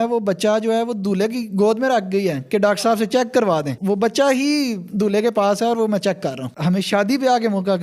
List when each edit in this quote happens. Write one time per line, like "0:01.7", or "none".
0:03.7
0:06.5